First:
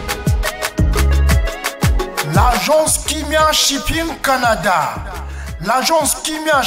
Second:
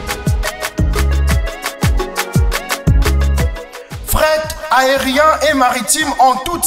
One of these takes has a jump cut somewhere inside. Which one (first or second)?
first